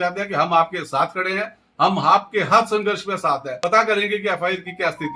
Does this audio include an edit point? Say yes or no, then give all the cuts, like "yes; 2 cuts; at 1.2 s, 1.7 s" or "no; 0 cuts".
yes; 1 cut; at 3.5 s